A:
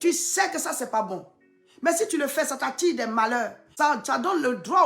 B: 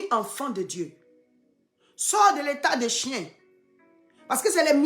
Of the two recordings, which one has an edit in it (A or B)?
A